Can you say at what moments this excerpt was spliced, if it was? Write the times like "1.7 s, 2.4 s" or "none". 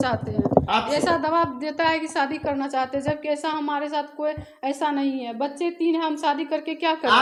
none